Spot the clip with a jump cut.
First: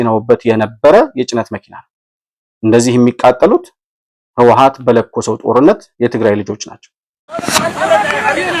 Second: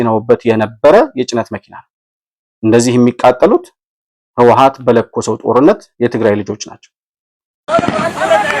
first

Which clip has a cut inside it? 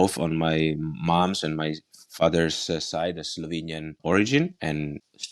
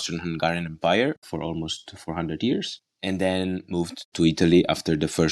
second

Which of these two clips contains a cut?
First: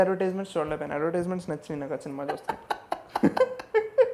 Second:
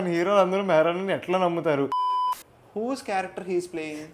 second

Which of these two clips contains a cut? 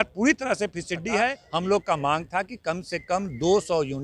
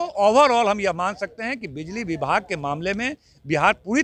first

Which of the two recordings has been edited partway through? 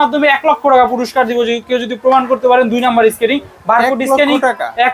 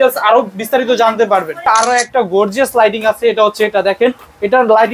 second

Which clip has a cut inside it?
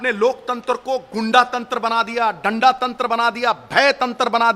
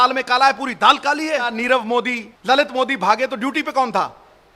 second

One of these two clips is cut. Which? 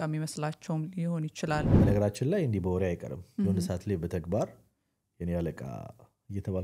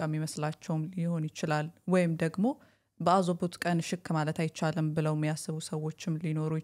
first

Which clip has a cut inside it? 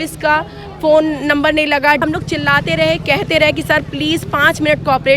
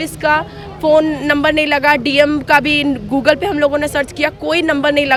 first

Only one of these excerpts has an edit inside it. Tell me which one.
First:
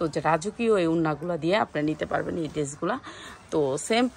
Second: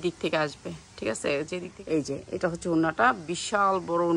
second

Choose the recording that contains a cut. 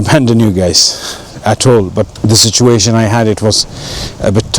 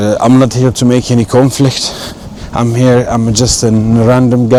first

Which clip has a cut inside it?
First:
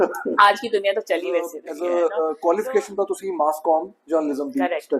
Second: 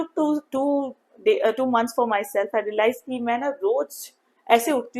first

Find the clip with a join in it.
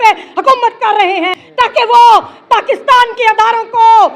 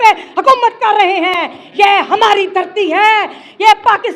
first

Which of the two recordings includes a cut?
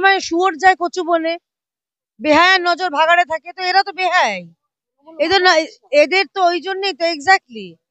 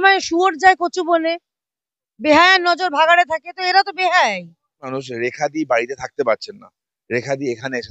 second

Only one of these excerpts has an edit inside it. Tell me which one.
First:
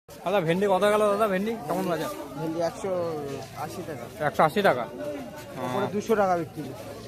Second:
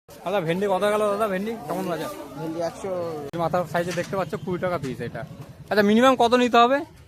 second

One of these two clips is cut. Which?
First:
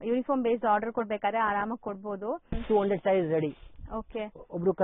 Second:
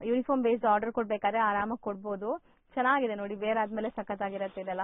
first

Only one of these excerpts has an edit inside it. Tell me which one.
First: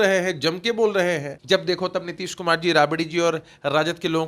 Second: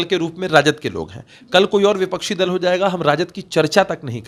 first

